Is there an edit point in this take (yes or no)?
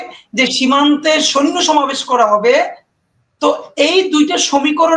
no